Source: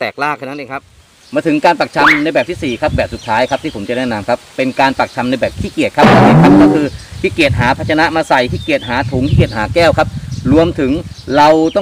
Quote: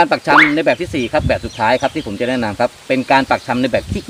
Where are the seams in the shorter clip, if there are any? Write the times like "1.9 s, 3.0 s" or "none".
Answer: none